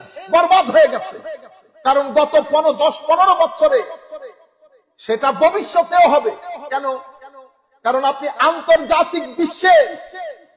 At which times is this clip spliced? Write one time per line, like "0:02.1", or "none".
none